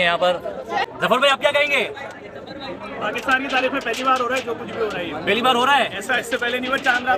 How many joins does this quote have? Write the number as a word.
one